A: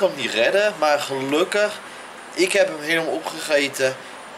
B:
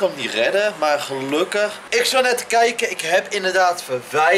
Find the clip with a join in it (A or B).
B